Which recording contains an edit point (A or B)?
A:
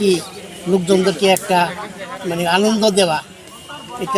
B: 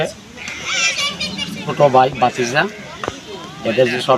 B